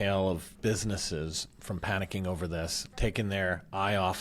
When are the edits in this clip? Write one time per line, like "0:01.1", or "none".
0:02.8